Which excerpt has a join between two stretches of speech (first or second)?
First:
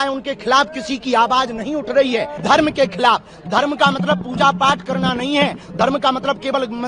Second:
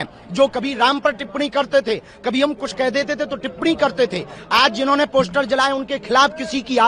first